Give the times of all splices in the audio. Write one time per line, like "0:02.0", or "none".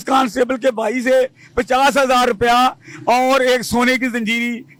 none